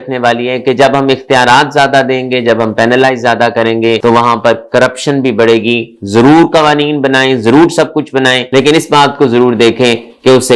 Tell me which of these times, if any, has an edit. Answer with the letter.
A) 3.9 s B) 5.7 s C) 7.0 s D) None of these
D